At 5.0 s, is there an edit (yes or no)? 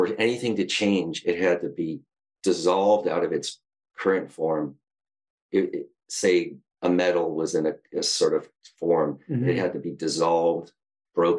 yes